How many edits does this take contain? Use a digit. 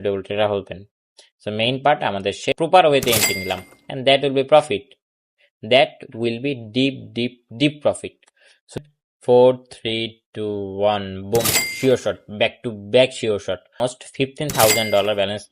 3